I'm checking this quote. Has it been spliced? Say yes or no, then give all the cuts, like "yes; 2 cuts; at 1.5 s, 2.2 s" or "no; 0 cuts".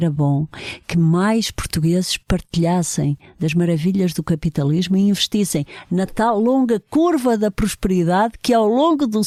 no; 0 cuts